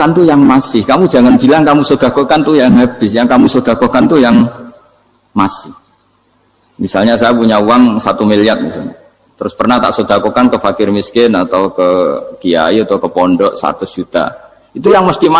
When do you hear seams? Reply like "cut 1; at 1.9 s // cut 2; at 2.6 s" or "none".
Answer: none